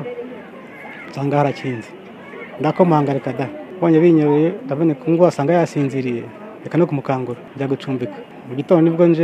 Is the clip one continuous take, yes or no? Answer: no